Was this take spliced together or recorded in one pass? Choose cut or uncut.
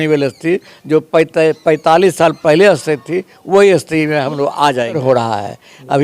cut